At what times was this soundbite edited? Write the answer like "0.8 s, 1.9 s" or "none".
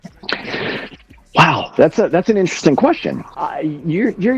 3.2 s